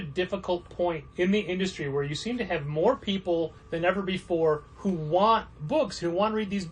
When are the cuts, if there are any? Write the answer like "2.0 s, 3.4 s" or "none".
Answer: 1.1 s, 3.6 s, 4.7 s